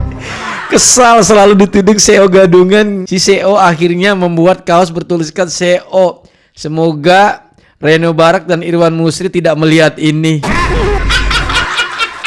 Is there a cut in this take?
yes; 1 cut; at 3.1 s

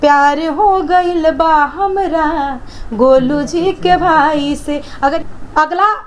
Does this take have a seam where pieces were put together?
yes; 1 cut; at 5.1 s

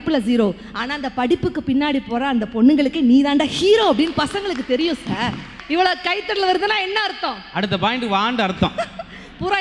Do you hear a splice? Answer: yes; 1 cut; at 5.6 s

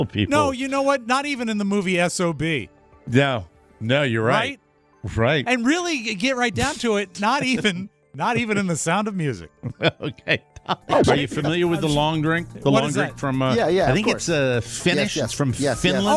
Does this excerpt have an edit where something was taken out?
yes; 1 cut; at 11.0 s

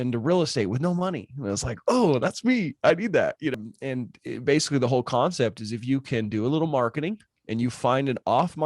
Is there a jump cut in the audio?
yes; 1 cut; at 3.5 s

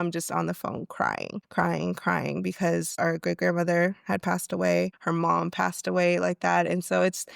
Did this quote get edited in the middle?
yes; 3 cuts; at 1.4 s, 2.9 s, 5.0 s

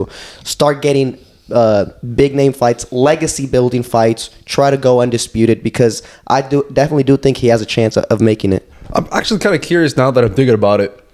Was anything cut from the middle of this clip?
no; 0 cuts

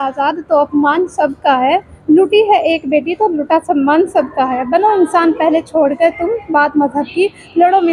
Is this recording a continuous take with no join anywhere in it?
yes; 0 cuts

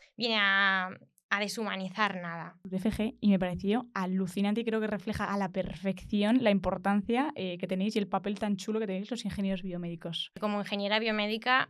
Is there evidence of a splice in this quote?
yes; 2 cuts; at 2.7 s, 10.4 s

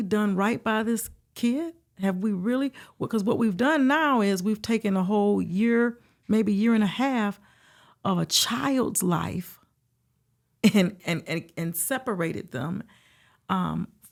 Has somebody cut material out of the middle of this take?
no; 0 cuts

